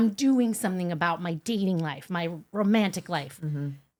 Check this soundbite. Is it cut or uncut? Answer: uncut